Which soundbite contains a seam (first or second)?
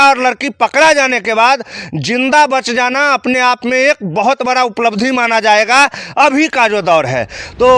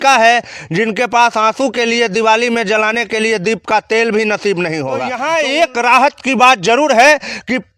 second